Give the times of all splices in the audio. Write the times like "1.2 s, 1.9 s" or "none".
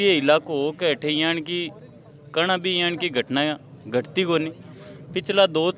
none